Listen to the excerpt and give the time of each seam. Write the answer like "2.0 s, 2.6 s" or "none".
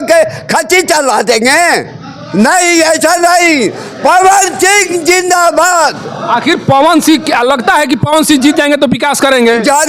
none